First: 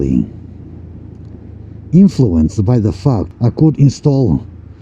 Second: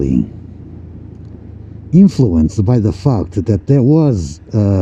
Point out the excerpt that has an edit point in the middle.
first; 1 cut; at 3.3 s

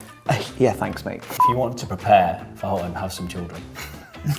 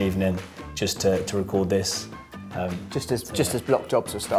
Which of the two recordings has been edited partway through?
first; 1 cut; at 1.3 s

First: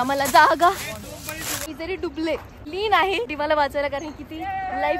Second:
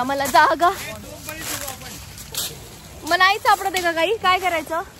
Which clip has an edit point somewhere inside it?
first; 3 cuts; at 1.6 s, 2.5 s, 3.3 s

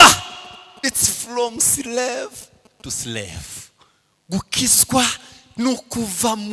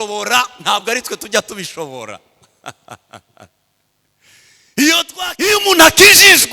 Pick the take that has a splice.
second; 1 cut; at 5.1 s

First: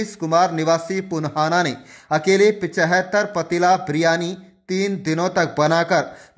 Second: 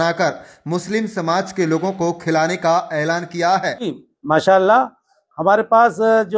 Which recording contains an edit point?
second; 1 cut; at 4.1 s

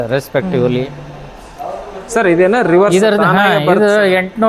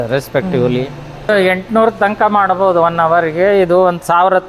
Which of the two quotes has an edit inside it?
second; 1 cut; at 1.3 s

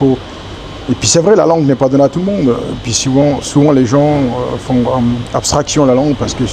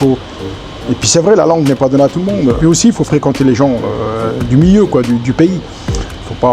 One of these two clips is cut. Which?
second; 1 cut; at 2.6 s

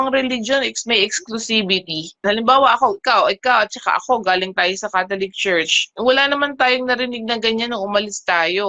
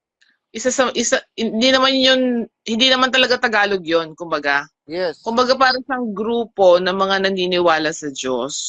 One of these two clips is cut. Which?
first; 1 cut; at 2.2 s

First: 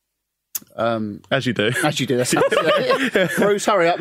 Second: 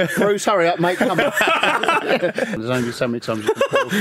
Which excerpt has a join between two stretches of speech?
second; 1 cut; at 2.6 s

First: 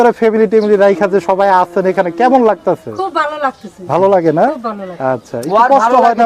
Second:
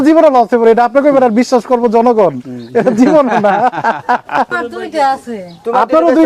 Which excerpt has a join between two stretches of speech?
second; 1 cut; at 4.6 s

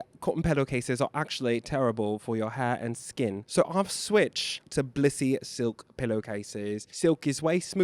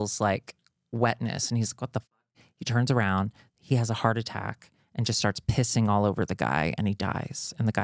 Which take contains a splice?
first; 3 cuts; at 3.4 s, 4.6 s, 6.8 s

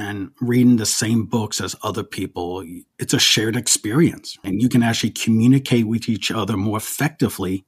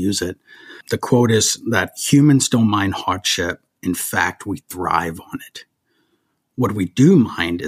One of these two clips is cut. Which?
first; 1 cut; at 2.8 s

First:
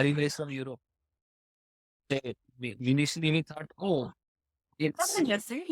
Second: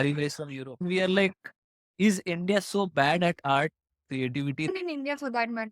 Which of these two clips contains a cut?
second; 2 cuts; at 0.8 s, 4.7 s

